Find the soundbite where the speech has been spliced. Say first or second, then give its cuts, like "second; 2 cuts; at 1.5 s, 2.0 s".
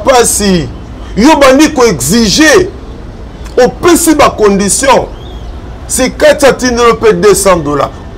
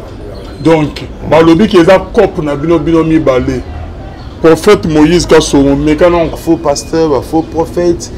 second; 1 cut; at 6.3 s